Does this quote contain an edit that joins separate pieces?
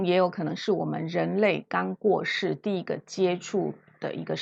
no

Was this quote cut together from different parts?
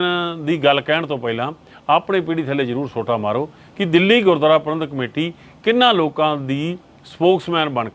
no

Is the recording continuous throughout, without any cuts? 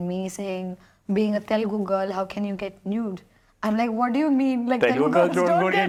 yes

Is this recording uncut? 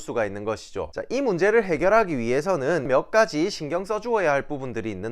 no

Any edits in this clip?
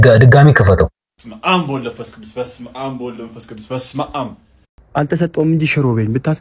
yes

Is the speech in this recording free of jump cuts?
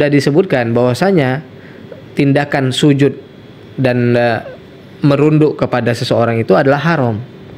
yes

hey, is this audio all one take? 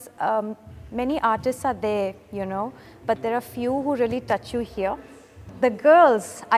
no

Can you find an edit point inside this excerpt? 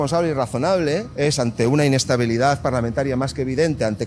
yes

